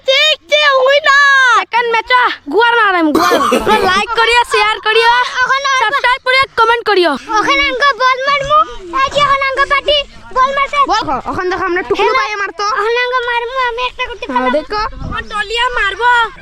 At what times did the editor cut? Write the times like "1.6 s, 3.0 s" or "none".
3.6 s, 7.2 s, 11.0 s